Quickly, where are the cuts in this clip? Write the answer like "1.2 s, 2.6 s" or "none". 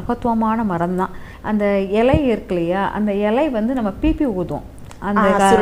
1.3 s